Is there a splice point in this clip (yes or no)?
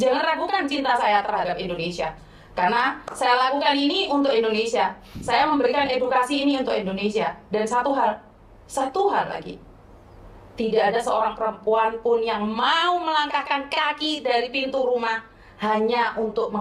no